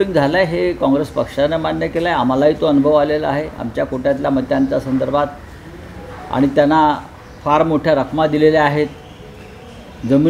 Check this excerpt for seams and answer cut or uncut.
uncut